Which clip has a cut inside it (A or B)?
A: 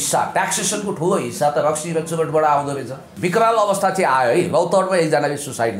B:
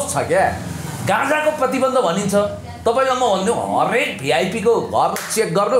A